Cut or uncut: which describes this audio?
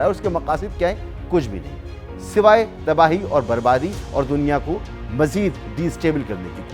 uncut